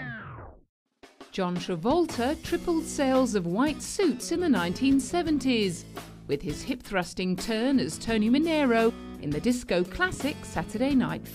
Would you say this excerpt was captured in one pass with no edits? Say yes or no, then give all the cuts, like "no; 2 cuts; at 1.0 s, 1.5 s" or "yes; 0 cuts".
yes; 0 cuts